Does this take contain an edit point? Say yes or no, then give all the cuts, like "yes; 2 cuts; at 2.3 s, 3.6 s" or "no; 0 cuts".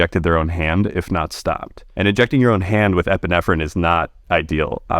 yes; 1 cut; at 1.8 s